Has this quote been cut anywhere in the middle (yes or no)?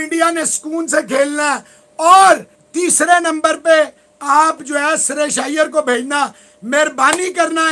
yes